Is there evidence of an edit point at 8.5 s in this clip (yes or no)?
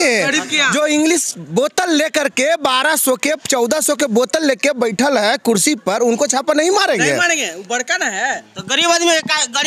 no